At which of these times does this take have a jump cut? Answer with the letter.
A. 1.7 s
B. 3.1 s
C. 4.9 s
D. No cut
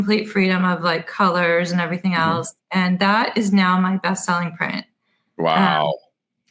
D